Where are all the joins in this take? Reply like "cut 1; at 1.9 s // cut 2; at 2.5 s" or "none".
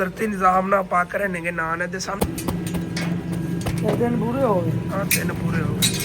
cut 1; at 2.2 s